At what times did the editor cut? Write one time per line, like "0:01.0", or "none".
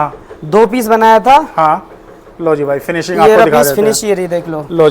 none